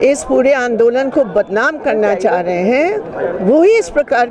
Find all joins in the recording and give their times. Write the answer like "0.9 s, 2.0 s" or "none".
none